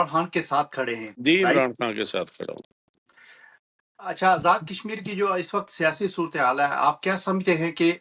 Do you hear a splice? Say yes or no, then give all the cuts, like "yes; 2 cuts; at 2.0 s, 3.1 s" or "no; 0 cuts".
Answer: no; 0 cuts